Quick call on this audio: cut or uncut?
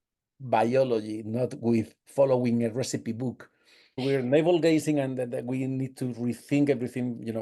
cut